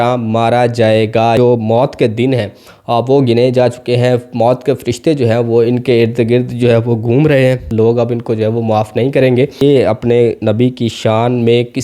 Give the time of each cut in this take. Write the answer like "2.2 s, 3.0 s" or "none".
1.4 s, 7.7 s, 9.5 s